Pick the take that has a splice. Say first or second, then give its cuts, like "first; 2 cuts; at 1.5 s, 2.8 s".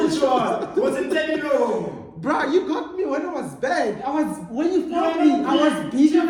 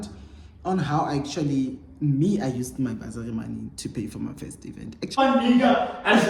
second; 1 cut; at 5.2 s